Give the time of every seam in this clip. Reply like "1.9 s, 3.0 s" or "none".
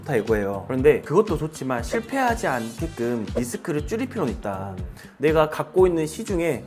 1.0 s, 3.3 s, 5.0 s

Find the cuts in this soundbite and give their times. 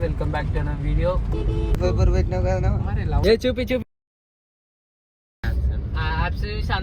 1.8 s, 3.2 s

